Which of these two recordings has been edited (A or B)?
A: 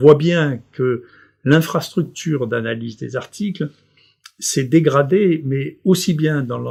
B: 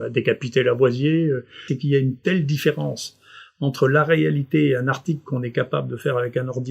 B